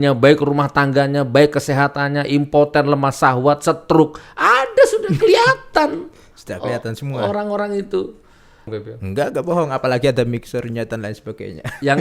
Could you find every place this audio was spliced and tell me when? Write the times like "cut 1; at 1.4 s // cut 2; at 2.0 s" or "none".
cut 1; at 8.7 s